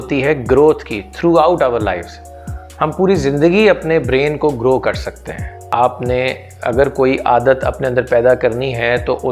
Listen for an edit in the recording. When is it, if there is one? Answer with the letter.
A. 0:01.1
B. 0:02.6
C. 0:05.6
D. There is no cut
C